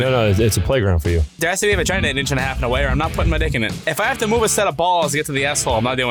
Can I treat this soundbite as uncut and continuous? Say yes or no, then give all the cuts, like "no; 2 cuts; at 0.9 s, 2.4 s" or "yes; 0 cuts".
no; 1 cut; at 1.3 s